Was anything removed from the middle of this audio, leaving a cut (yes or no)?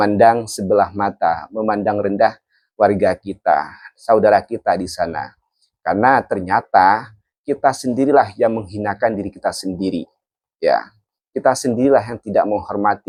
no